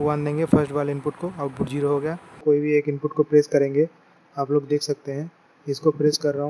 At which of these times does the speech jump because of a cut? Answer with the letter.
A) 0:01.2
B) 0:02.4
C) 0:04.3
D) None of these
B